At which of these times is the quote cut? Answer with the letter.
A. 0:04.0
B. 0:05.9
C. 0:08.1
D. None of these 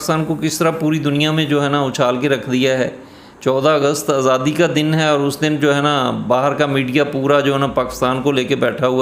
D